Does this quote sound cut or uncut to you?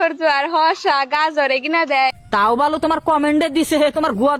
uncut